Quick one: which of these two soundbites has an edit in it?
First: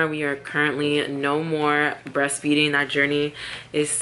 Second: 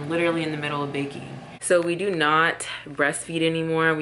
second; 1 cut; at 1.8 s

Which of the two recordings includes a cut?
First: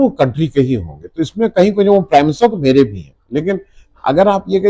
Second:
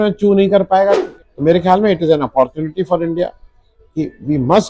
second; 1 cut; at 1.1 s

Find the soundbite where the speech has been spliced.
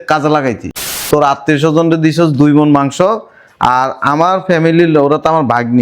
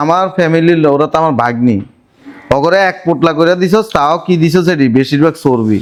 first; 1 cut; at 1.0 s

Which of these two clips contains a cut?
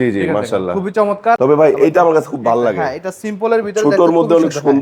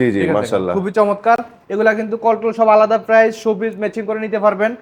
first; 1 cut; at 1.4 s

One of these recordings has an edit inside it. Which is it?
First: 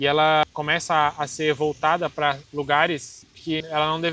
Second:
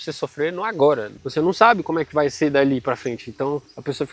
second; 1 cut; at 1.1 s

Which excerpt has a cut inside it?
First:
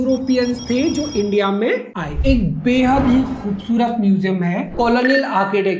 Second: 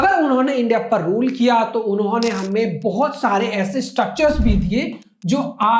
first; 2 cuts; at 2.2 s, 4.7 s

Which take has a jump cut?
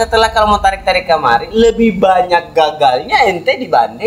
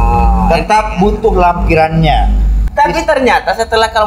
second; 1 cut; at 2.6 s

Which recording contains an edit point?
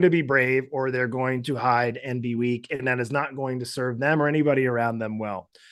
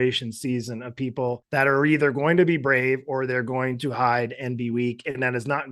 second; 1 cut; at 1.4 s

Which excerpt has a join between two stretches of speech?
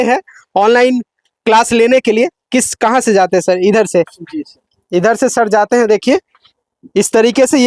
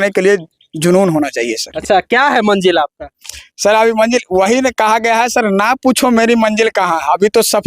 second; 1 cut; at 1.6 s

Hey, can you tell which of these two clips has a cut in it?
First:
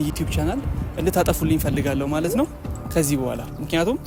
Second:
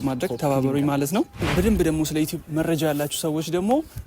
second; 1 cut; at 1.5 s

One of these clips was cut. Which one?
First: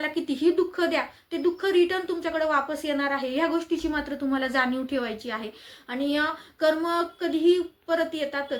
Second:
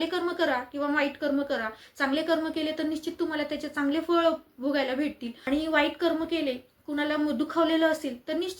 second; 1 cut; at 5.3 s

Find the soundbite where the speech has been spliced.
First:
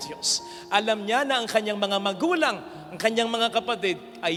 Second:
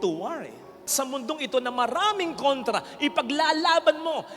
second; 1 cut; at 0.9 s

